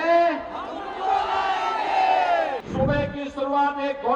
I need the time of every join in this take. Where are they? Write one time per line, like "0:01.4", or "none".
0:02.6